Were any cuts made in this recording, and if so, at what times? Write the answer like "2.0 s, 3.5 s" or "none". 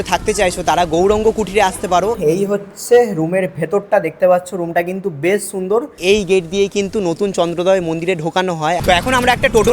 2.2 s, 6.0 s, 8.8 s